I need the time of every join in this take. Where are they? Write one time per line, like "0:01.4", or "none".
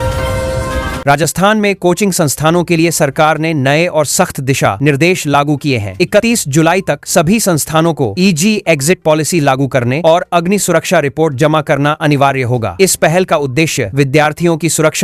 0:01.0